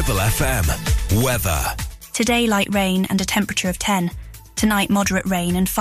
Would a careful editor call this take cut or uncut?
uncut